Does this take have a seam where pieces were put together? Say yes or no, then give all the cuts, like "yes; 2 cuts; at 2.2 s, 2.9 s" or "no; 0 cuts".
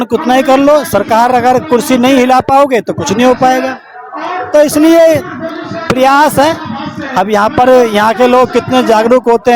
no; 0 cuts